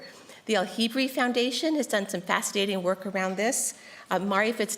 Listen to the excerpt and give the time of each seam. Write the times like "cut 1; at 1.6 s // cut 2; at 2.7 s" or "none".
cut 1; at 2.0 s